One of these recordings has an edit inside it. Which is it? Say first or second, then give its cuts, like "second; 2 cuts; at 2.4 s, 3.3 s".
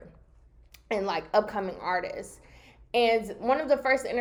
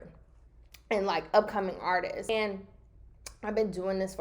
second; 1 cut; at 2.3 s